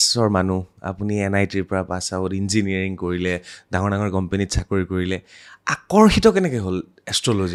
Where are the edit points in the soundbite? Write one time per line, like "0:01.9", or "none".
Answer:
none